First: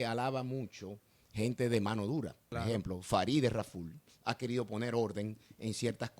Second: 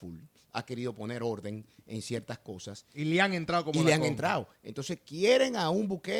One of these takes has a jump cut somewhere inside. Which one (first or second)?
first